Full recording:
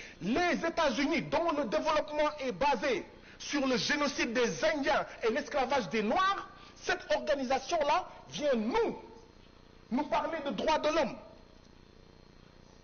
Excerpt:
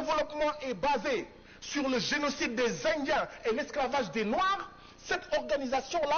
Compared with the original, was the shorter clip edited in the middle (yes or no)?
no